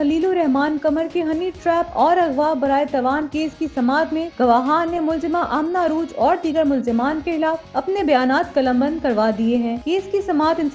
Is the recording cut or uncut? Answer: uncut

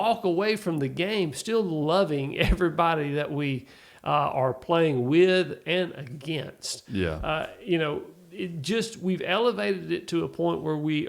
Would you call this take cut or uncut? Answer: uncut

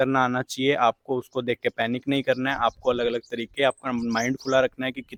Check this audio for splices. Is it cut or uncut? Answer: uncut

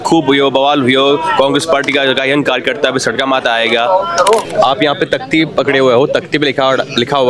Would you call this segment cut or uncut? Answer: cut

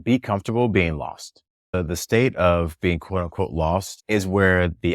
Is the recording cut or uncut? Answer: cut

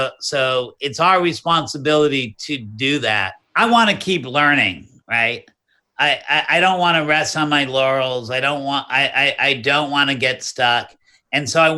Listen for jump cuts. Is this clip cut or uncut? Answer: cut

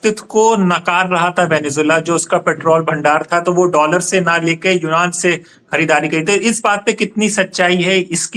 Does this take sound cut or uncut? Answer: uncut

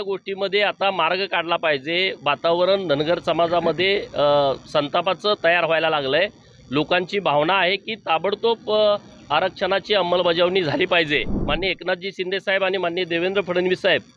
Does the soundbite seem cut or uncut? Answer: cut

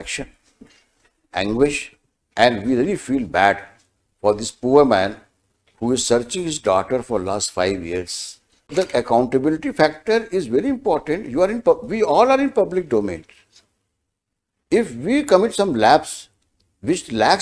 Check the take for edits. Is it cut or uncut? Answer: cut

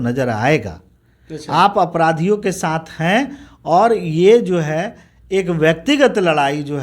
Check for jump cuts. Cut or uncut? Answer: uncut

